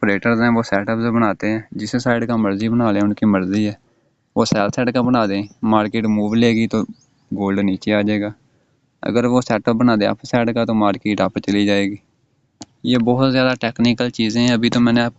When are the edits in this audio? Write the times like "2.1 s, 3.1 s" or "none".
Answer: none